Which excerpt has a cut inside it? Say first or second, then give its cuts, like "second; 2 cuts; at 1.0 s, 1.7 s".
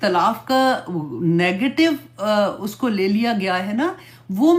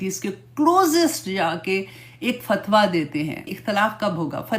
second; 1 cut; at 3.5 s